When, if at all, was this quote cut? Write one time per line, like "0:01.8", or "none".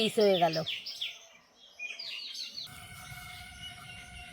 0:02.7